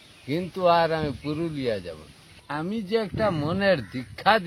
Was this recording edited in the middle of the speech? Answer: yes; 1 cut; at 2.3 s

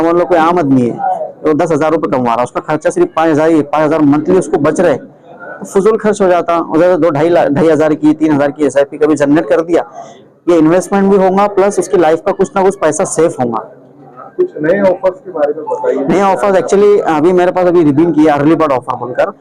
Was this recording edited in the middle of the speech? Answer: no; 0 cuts

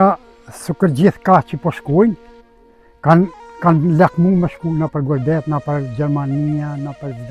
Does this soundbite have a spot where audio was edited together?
no; 0 cuts

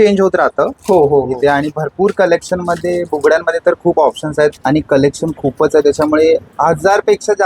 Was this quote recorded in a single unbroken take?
no; 1 cut; at 4.6 s

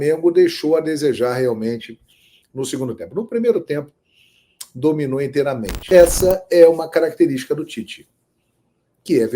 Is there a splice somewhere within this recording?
yes; 1 cut; at 5.7 s

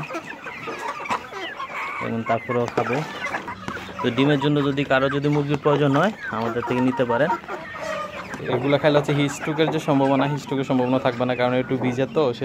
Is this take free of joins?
no; 2 cuts; at 3.6 s, 8.3 s

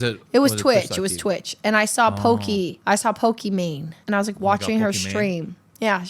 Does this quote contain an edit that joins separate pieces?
no; 0 cuts

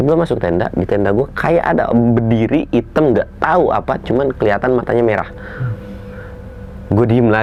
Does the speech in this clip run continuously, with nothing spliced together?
yes; 0 cuts

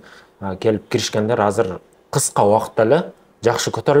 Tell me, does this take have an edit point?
no; 0 cuts

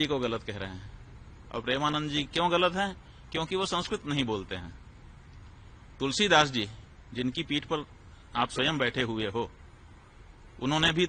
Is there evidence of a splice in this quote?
no; 0 cuts

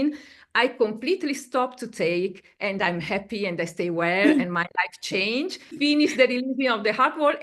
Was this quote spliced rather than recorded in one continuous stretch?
yes; 1 cut; at 5.8 s

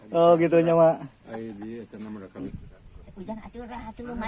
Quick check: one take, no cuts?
no; 1 cut; at 2.5 s

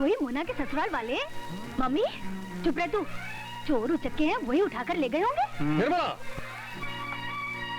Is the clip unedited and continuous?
yes; 0 cuts

